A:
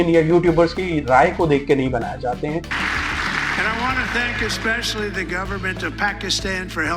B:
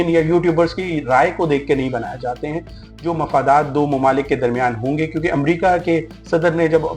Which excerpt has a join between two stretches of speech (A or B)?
A